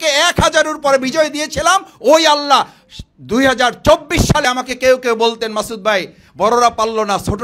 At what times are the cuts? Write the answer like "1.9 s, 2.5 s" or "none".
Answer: 4.4 s